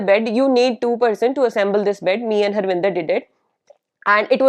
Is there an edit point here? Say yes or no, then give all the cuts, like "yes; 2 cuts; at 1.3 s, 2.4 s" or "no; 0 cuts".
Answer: no; 0 cuts